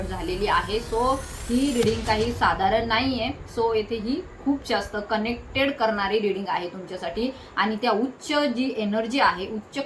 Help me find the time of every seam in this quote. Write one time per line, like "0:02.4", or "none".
none